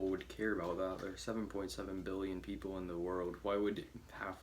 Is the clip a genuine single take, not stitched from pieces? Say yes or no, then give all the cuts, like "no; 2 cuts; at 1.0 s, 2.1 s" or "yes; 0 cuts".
yes; 0 cuts